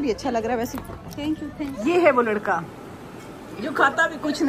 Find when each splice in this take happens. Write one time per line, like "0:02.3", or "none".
0:01.7